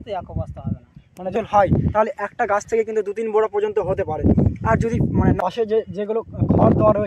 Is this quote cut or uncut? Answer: cut